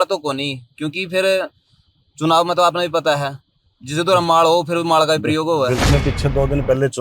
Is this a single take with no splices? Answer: no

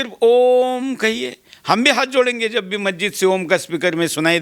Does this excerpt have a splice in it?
no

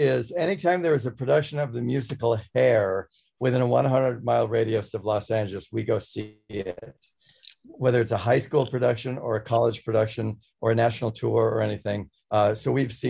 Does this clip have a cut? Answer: no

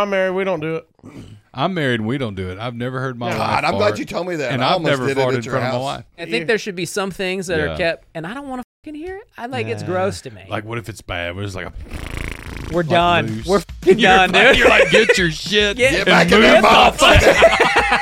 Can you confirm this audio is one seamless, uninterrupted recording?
no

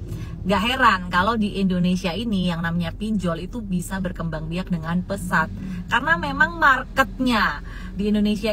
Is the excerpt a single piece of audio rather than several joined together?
yes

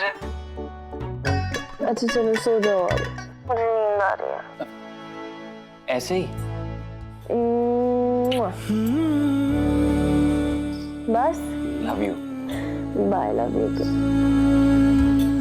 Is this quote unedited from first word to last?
no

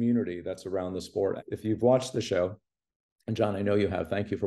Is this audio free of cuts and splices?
no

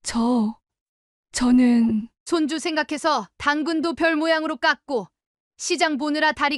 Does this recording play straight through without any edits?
yes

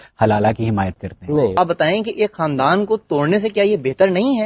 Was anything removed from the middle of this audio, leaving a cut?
yes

